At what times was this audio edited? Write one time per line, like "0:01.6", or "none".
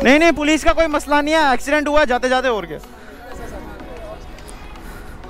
none

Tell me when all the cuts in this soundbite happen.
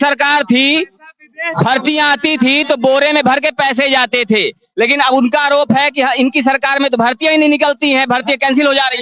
none

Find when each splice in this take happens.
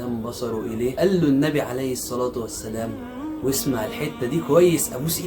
0:01.0

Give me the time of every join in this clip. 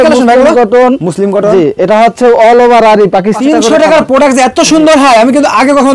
0:03.4

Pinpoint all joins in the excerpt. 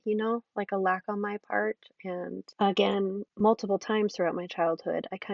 0:02.5
0:03.3

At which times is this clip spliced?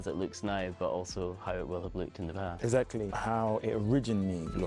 0:03.1

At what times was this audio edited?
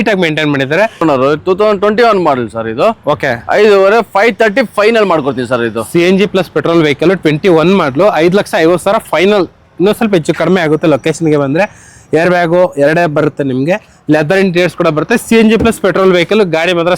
0:01.0

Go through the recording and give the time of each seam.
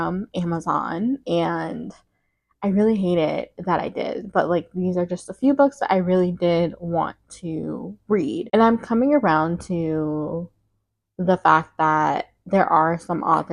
none

